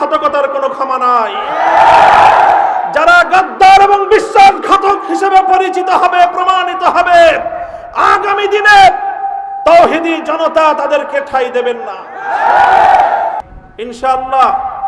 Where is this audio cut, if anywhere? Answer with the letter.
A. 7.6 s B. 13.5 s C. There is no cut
B